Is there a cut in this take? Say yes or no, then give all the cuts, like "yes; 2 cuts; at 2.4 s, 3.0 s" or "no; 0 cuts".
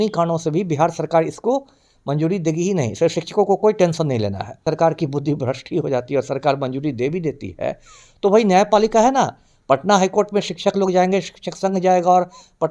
yes; 1 cut; at 4.6 s